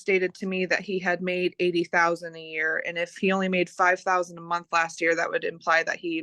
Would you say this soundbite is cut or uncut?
uncut